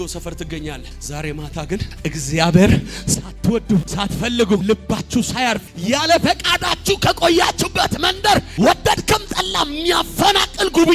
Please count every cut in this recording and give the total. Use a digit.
4